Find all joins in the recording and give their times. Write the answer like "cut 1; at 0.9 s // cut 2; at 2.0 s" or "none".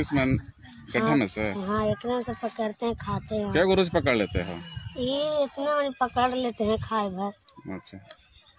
none